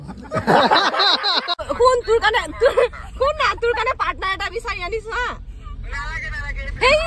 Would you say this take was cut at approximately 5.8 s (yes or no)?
no